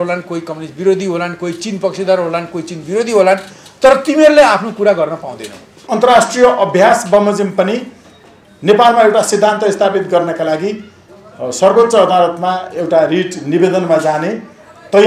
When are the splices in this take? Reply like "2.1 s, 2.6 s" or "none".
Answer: 5.8 s

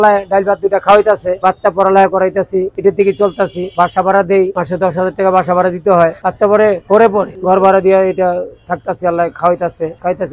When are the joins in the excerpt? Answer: none

